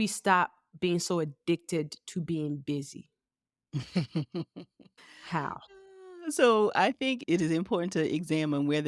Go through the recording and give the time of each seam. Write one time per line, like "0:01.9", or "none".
0:07.2